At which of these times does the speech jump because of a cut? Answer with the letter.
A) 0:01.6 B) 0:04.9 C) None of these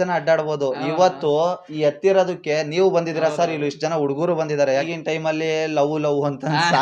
B